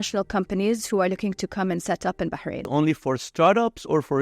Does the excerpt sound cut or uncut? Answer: cut